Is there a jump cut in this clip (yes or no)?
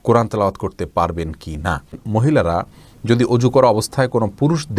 yes